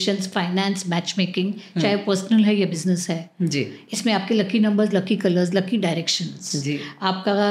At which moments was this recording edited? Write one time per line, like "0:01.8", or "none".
none